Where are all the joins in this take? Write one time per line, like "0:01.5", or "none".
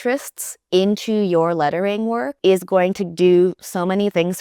0:02.3